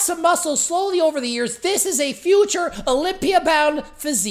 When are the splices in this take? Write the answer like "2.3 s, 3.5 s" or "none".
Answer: none

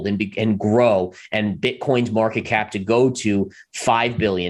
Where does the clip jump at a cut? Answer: none

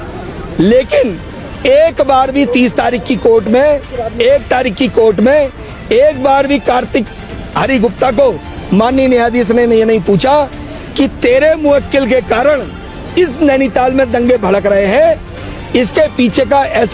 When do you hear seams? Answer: none

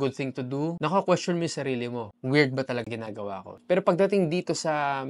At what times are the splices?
3.5 s

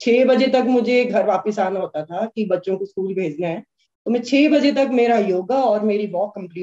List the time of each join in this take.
none

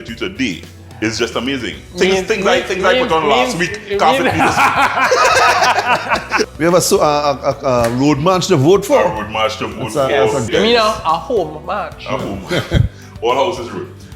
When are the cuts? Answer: 6.5 s, 10.5 s

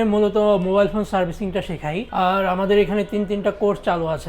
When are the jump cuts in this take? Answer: 2.0 s

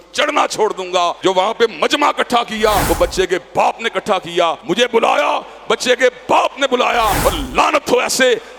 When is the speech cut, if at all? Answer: 1.2 s, 2.8 s, 4.6 s, 7.2 s

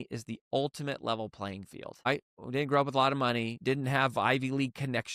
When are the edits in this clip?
2.1 s, 3.6 s

